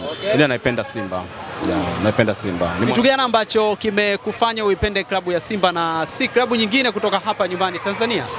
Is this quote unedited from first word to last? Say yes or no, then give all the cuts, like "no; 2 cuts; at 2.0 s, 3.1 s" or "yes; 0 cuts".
yes; 0 cuts